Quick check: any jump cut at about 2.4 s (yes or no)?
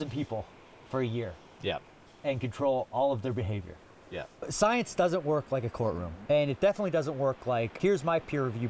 no